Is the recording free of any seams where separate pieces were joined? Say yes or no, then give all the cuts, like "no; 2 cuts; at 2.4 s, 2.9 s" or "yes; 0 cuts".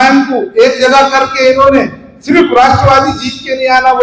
yes; 0 cuts